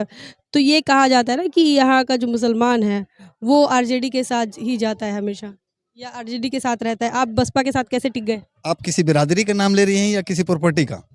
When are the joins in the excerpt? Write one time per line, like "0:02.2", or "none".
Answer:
none